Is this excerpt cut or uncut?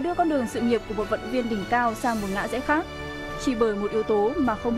uncut